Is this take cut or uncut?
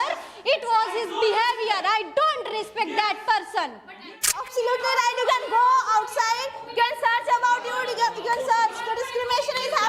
cut